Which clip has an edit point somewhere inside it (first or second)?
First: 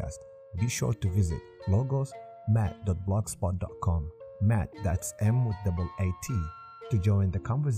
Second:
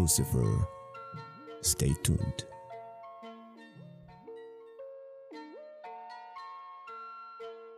second